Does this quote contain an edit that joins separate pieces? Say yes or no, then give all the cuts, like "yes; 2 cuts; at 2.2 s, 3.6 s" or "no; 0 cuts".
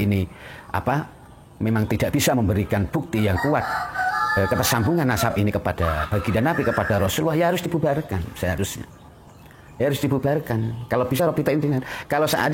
no; 0 cuts